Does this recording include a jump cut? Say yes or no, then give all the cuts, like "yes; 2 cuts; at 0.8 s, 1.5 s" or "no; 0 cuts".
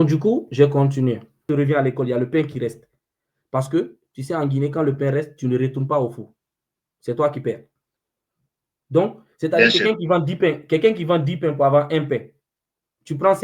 yes; 1 cut; at 1.5 s